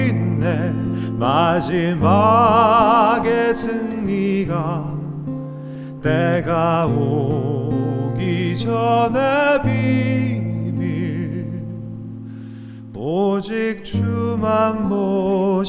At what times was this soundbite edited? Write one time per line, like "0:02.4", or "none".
none

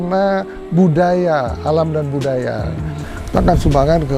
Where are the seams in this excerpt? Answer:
0:03.0

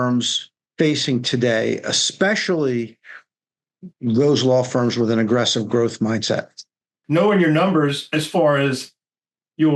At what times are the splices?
0:07.0

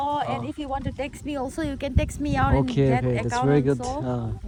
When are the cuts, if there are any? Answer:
none

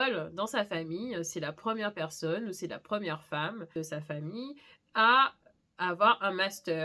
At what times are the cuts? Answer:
none

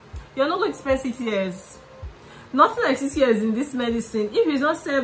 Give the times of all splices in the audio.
none

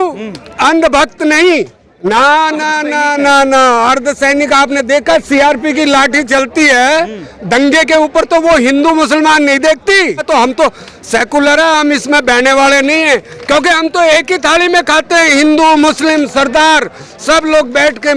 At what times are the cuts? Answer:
0:02.1
0:10.2

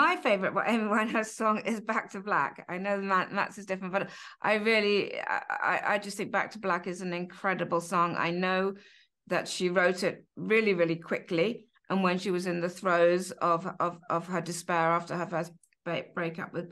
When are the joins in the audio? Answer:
none

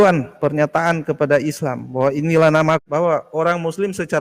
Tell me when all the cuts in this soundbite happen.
0:02.8

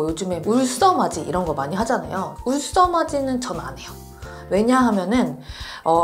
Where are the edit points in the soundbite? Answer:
none

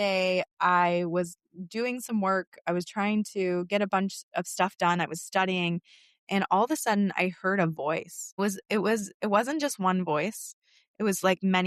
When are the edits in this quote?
none

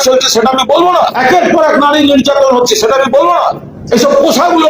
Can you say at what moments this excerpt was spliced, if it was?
0:01.1
0:03.7

